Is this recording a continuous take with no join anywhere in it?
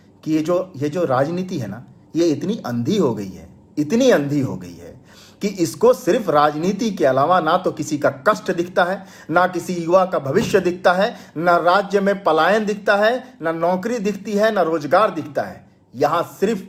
yes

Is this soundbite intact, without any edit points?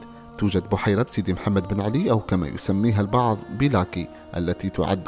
yes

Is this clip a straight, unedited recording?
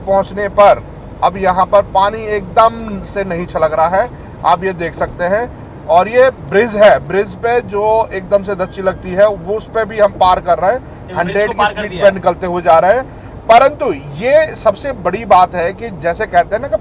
yes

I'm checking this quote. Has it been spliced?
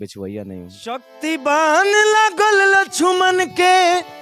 yes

